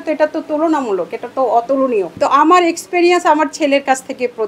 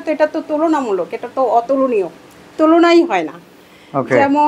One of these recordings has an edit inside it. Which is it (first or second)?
first